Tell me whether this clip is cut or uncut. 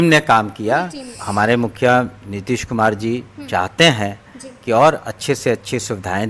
cut